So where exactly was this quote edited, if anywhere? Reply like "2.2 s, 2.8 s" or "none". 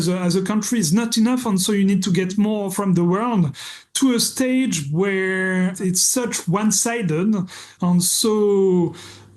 2.7 s, 5.8 s, 7.7 s